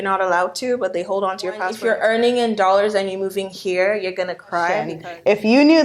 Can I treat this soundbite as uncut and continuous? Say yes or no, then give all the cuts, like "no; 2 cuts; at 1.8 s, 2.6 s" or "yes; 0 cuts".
no; 2 cuts; at 1.8 s, 4.9 s